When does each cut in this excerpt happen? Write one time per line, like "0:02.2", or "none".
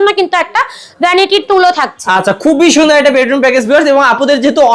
none

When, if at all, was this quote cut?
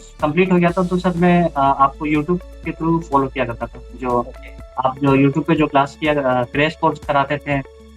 none

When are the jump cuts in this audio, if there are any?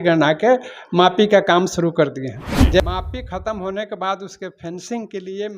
0:02.8

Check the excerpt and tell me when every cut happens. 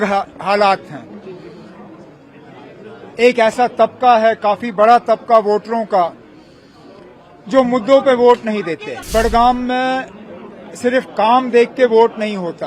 0:08.9

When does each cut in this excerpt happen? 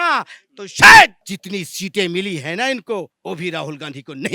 0:01.2
0:03.1

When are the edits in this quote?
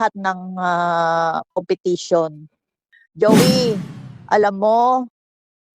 0:02.9

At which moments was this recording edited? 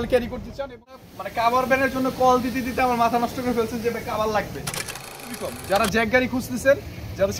0:01.1
0:05.1

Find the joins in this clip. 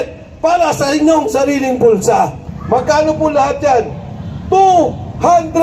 0:02.5

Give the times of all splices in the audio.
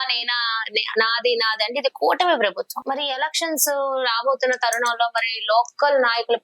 0:02.8

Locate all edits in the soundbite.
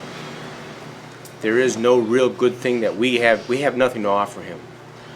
0:01.2

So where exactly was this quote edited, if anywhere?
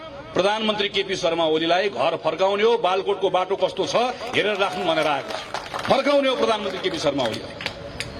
none

